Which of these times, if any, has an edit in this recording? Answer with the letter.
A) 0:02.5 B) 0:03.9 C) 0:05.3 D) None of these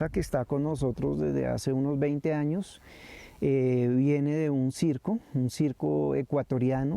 D